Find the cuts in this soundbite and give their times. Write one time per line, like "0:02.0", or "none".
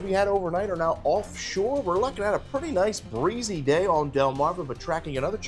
none